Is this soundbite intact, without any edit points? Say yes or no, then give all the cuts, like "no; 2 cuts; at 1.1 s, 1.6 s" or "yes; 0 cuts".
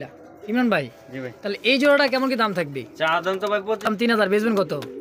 no; 1 cut; at 3.9 s